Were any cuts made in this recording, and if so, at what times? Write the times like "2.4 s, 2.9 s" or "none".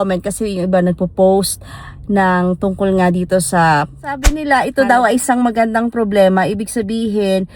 4.3 s